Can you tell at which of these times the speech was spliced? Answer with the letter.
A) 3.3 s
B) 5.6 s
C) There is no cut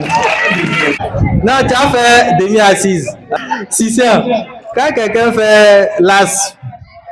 A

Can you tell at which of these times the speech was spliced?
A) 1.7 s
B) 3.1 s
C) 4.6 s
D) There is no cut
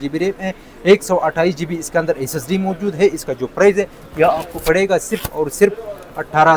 D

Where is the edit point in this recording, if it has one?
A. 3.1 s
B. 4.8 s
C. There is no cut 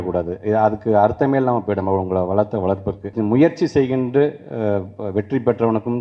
A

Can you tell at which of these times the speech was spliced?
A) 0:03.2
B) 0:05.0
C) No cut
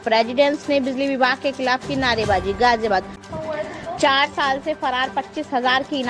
A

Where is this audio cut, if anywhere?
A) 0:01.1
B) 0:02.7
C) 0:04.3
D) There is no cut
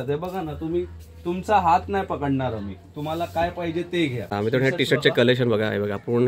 C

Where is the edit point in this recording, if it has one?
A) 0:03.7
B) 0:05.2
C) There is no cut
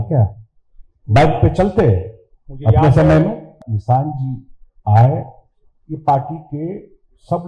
A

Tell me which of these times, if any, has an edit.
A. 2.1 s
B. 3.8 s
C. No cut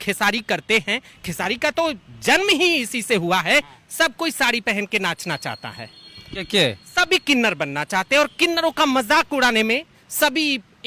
B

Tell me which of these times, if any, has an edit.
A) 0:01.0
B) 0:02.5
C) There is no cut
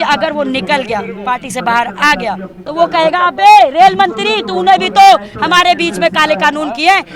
B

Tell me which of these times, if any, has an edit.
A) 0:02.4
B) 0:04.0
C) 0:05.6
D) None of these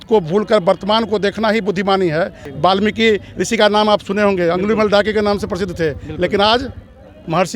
A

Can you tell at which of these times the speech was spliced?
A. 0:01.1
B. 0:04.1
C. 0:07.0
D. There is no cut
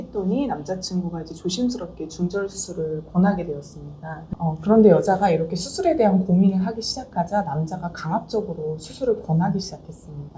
B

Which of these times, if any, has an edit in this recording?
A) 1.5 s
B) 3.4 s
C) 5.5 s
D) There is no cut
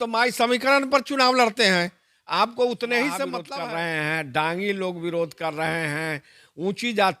B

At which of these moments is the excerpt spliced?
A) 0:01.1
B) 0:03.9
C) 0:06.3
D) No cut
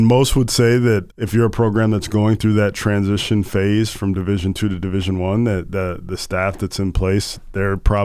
A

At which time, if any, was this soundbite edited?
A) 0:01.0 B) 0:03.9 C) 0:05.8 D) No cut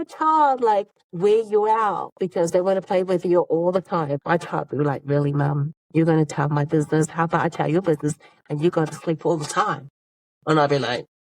A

